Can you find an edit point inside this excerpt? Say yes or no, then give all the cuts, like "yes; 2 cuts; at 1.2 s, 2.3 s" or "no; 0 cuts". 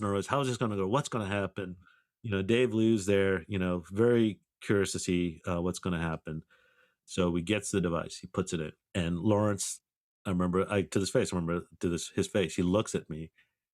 yes; 1 cut; at 6.9 s